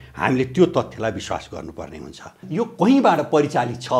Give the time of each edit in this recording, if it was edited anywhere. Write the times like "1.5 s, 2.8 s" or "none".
2.4 s

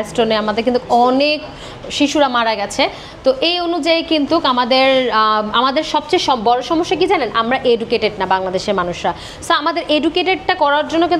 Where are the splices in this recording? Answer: none

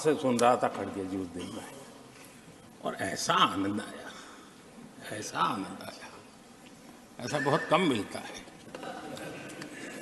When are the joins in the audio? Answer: 2.3 s

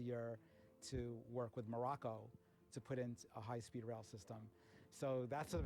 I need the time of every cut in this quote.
none

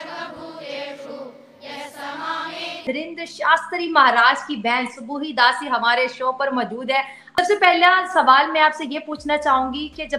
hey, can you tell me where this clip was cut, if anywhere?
2.8 s, 7.4 s

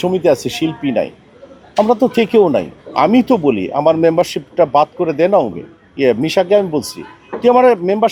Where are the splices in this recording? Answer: none

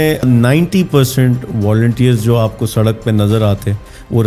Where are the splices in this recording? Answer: none

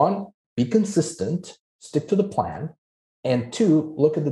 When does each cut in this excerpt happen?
none

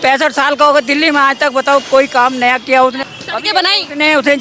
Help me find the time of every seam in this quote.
3.0 s

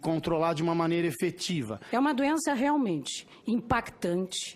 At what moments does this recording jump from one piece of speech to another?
1.8 s

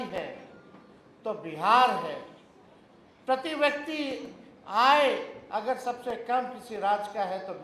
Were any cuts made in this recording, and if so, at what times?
none

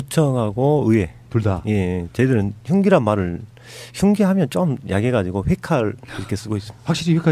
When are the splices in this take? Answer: 1.8 s

